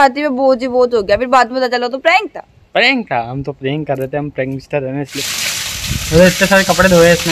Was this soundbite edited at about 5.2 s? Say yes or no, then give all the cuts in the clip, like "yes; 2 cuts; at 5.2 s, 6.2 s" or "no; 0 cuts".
yes; 1 cut; at 5.2 s